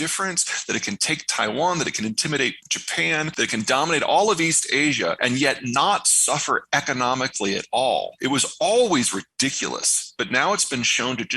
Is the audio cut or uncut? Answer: cut